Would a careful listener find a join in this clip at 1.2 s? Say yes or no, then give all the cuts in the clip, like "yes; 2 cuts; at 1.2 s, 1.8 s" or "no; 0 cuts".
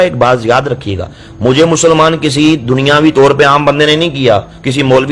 no; 0 cuts